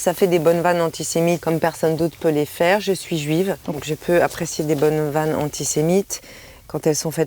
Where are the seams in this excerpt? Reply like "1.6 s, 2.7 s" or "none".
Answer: 1.4 s, 3.9 s